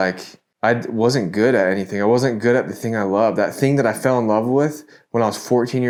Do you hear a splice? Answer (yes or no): no